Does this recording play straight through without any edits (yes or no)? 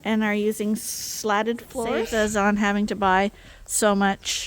no